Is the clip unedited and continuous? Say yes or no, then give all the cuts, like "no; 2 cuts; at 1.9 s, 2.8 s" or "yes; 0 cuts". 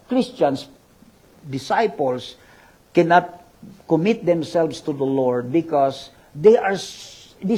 yes; 0 cuts